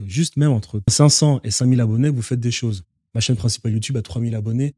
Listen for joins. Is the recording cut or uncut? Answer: cut